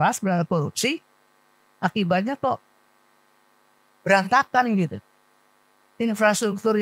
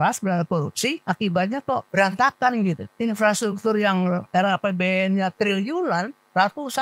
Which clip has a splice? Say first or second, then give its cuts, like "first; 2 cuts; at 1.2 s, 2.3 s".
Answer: second; 4 cuts; at 1.0 s, 1.9 s, 2.9 s, 4.2 s